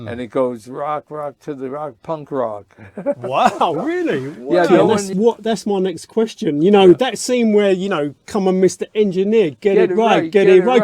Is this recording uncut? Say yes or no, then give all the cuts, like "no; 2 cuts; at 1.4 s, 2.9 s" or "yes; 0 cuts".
no; 1 cut; at 4.7 s